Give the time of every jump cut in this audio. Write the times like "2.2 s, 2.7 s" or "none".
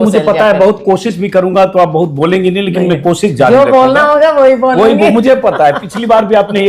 none